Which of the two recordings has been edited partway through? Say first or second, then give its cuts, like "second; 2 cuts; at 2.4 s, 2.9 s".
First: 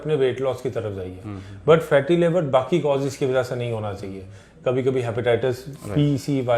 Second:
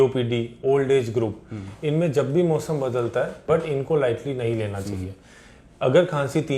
second; 1 cut; at 3.4 s